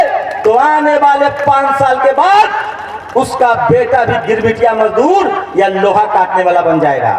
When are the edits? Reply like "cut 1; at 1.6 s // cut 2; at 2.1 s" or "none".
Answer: none